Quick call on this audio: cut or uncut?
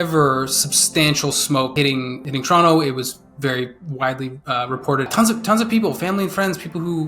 cut